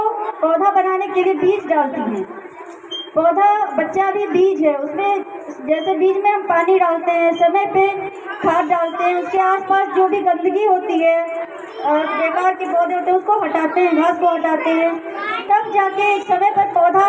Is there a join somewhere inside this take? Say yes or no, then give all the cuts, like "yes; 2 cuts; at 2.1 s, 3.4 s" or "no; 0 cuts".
no; 0 cuts